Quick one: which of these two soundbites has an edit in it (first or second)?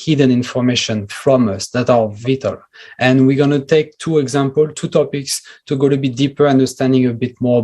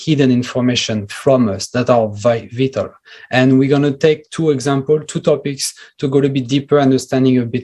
first